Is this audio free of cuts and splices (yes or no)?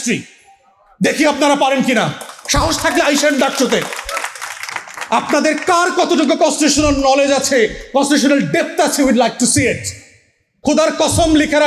no